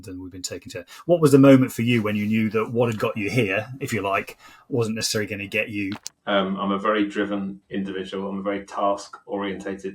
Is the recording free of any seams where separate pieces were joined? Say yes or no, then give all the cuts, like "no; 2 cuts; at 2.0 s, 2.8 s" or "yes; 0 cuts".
no; 1 cut; at 6.1 s